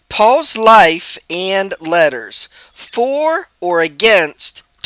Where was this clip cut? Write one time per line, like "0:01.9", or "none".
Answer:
none